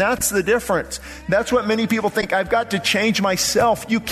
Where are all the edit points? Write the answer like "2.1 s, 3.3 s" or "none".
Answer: none